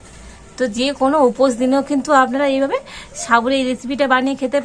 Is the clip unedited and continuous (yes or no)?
yes